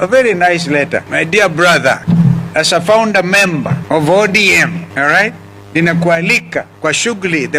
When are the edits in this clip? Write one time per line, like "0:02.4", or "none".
0:01.0
0:02.0
0:03.8
0:04.8
0:06.7